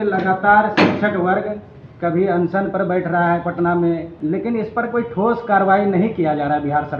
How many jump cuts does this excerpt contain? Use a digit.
1